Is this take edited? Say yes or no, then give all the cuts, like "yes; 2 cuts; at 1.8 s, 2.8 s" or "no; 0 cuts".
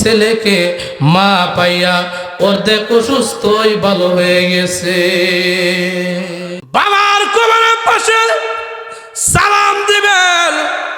yes; 1 cut; at 6.6 s